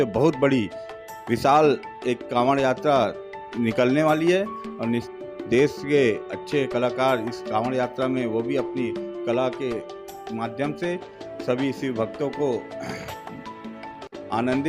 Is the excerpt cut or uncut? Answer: cut